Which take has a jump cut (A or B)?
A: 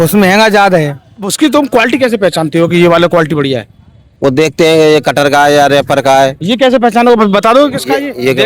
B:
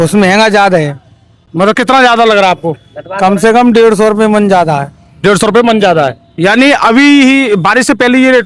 A